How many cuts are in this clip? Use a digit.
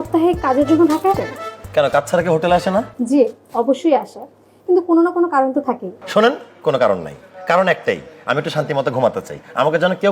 2